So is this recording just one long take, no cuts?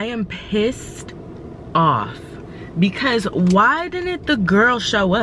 yes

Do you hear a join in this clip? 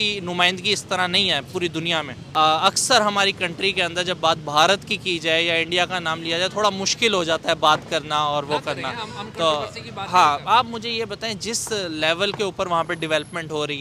yes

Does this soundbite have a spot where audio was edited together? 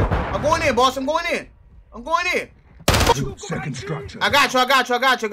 yes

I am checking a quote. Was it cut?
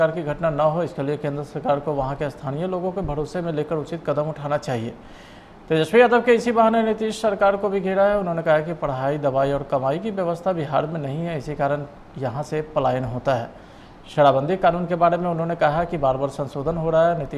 no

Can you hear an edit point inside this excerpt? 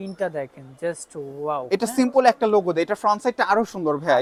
no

